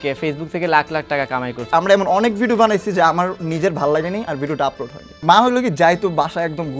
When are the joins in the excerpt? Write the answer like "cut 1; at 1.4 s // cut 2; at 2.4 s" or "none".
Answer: cut 1; at 1.7 s // cut 2; at 5.2 s